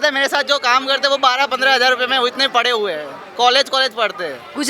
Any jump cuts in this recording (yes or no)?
no